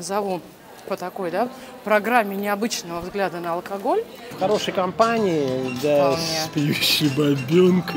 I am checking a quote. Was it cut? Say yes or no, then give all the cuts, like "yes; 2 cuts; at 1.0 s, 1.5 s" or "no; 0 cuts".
yes; 1 cut; at 4.3 s